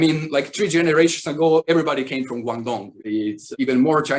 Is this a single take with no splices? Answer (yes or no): yes